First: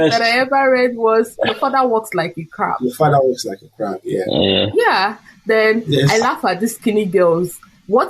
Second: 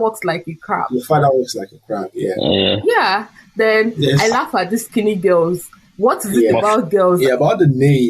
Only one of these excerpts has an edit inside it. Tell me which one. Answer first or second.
second